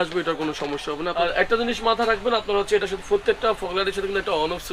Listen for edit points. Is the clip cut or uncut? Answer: cut